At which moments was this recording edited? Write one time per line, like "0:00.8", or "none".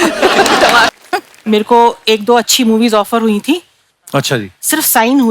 0:00.9